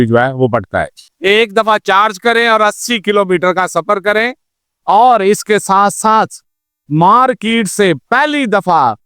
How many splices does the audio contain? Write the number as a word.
one